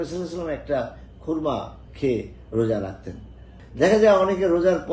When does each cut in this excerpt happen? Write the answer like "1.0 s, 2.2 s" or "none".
3.5 s